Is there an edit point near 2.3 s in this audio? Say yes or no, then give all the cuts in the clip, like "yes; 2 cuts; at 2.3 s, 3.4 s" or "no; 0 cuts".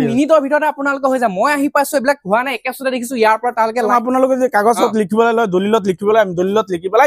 no; 1 cut; at 3.8 s